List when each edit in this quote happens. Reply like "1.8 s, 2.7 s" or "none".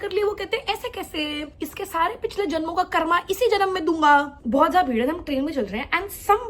1.5 s, 4.4 s

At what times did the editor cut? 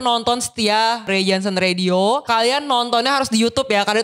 1.1 s, 2.2 s

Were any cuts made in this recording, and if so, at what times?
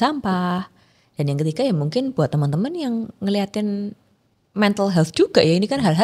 none

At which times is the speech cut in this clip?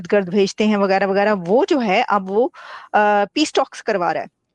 none

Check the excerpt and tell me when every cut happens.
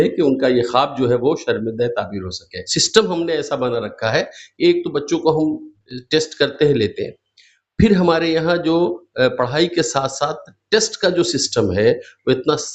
none

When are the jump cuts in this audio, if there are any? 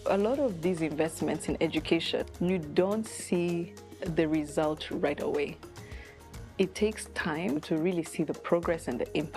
2.3 s, 7.6 s

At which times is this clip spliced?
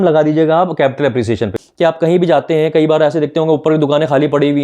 1.5 s

